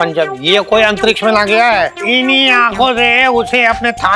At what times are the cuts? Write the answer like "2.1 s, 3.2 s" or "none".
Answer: 2.0 s